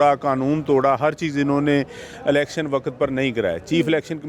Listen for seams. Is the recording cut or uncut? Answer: uncut